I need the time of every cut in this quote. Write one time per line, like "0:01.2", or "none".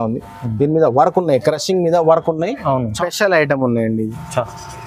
0:02.9